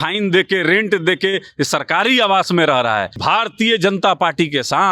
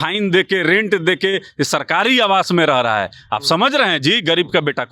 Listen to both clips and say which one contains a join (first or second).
first